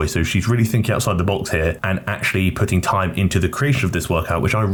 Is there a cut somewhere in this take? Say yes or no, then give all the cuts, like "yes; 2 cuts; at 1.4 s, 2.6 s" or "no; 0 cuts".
no; 0 cuts